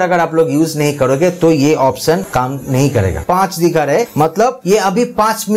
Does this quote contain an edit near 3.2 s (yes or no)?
yes